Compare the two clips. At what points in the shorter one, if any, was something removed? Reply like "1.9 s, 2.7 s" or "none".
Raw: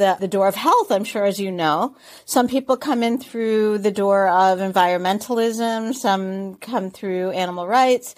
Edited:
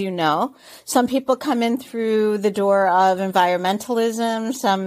none